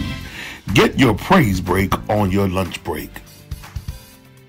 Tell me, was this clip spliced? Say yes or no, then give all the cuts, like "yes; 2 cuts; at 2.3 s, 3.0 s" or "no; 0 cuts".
yes; 1 cut; at 3.2 s